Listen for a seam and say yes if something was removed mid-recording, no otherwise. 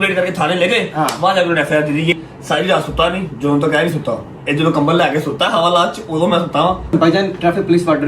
yes